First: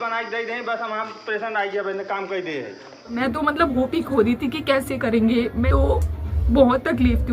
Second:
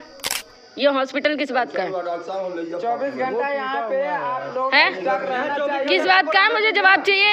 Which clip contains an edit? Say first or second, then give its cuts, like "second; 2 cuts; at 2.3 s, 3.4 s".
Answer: first; 2 cuts; at 3.1 s, 5.6 s